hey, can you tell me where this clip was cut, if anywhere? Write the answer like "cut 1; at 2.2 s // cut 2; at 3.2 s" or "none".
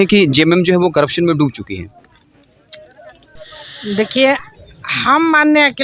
cut 1; at 3.3 s